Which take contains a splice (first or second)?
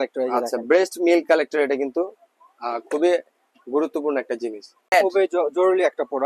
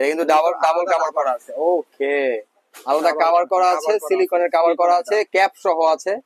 first